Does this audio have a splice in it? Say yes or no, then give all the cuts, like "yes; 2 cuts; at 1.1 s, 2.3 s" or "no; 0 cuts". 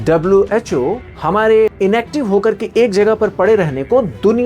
yes; 2 cuts; at 1.1 s, 1.7 s